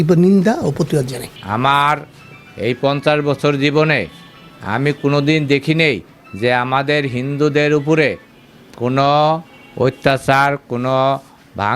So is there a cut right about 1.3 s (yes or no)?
no